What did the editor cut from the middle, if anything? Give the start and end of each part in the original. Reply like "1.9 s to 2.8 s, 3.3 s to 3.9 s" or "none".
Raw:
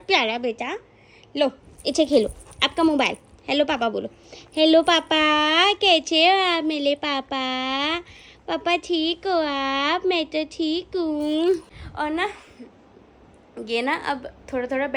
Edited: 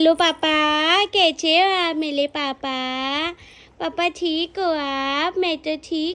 none